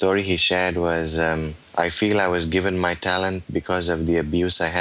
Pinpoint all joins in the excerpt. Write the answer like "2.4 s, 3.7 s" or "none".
none